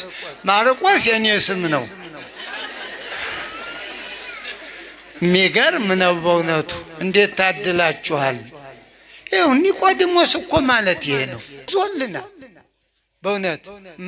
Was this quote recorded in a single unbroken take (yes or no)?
no